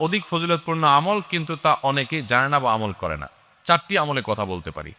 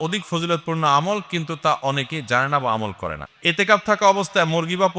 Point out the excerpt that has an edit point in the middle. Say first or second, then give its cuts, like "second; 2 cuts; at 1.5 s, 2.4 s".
second; 1 cut; at 3.3 s